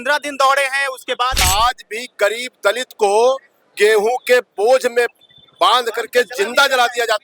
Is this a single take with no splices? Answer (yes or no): no